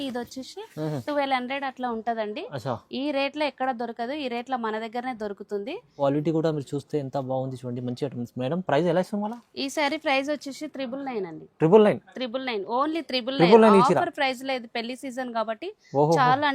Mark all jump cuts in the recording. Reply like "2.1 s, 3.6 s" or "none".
6.0 s